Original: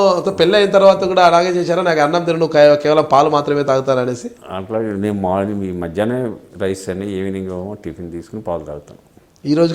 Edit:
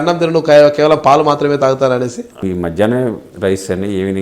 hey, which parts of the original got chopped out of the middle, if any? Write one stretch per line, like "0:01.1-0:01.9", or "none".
0:04.5-0:05.6